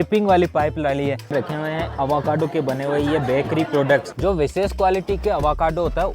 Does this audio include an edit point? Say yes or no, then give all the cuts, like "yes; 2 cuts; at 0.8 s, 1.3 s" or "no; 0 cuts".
yes; 2 cuts; at 1.3 s, 4.1 s